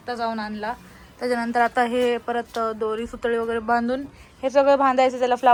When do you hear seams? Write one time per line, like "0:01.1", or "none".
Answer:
none